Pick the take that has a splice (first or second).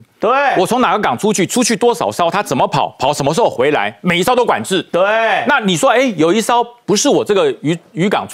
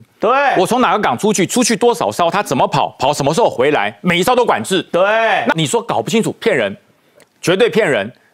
second